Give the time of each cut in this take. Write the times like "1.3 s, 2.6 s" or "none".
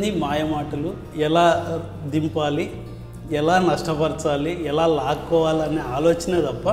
1.0 s